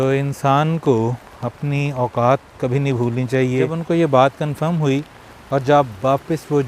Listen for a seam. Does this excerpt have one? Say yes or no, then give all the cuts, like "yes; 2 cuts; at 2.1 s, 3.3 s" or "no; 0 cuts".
yes; 1 cut; at 3.8 s